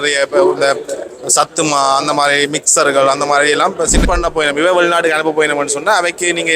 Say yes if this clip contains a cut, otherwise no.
yes